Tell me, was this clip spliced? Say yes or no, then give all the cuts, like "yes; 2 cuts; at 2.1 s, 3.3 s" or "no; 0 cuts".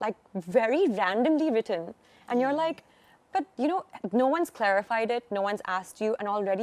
no; 0 cuts